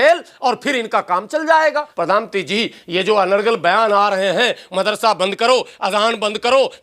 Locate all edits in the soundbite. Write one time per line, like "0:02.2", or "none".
0:01.9